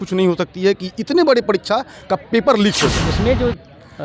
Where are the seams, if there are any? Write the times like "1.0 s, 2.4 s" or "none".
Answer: 3.0 s